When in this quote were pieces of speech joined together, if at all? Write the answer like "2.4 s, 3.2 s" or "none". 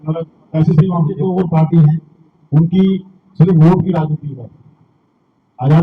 1.1 s